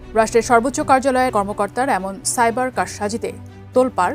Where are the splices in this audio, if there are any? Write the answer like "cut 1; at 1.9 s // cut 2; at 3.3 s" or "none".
cut 1; at 1.3 s